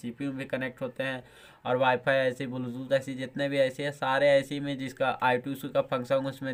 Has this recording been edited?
no; 0 cuts

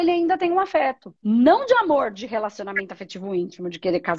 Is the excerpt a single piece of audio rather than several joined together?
no; 1 cut; at 1.1 s

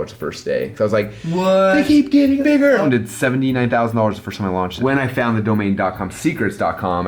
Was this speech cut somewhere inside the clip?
yes; 2 cuts; at 2.8 s, 4.7 s

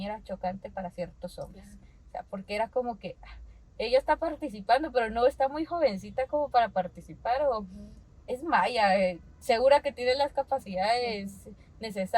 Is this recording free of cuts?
yes; 0 cuts

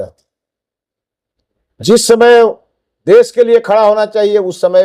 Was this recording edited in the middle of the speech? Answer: no; 0 cuts

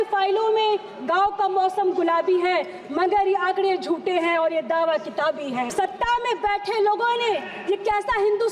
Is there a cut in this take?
yes; 1 cut; at 5.7 s

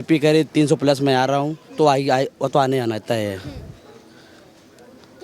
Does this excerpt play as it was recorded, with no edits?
yes; 0 cuts

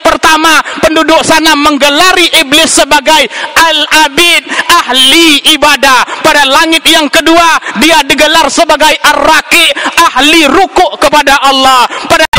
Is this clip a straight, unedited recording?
yes; 0 cuts

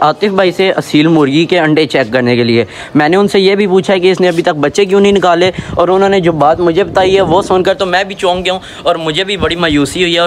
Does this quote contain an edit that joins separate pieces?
no; 0 cuts

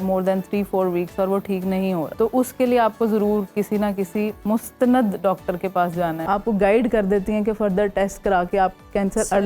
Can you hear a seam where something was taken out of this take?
yes; 2 cuts; at 2.1 s, 6.2 s

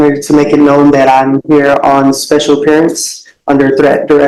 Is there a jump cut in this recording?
no; 0 cuts

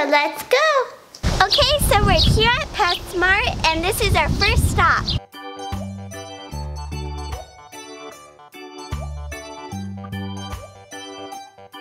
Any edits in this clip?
yes; 1 cut; at 1.4 s

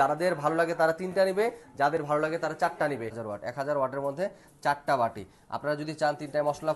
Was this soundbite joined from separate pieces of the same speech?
yes; 1 cut; at 3.2 s

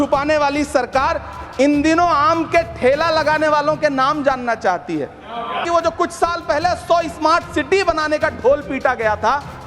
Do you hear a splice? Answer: yes; 1 cut; at 5.6 s

